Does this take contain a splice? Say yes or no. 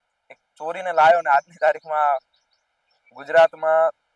no